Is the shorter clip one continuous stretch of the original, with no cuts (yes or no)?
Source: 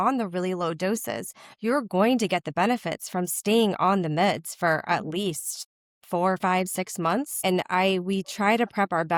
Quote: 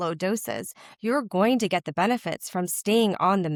yes